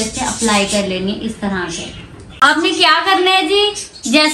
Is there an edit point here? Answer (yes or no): yes